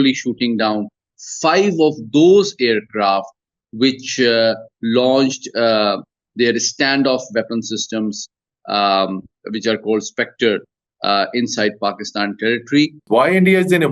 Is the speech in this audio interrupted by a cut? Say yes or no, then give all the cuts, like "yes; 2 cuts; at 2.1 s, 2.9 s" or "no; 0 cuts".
yes; 1 cut; at 13.0 s